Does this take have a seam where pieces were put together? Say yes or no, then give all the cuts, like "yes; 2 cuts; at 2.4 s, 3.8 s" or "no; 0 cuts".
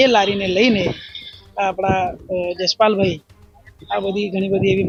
no; 0 cuts